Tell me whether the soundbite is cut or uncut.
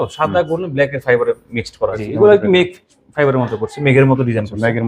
cut